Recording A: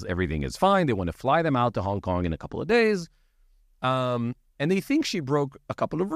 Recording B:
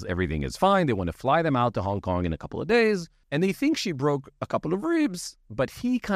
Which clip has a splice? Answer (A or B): B